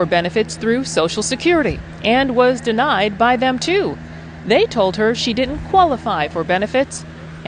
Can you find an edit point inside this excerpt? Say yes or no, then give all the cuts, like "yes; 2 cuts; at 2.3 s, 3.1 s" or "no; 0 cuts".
no; 0 cuts